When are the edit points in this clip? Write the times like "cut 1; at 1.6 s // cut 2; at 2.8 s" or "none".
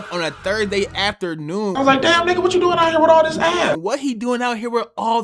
none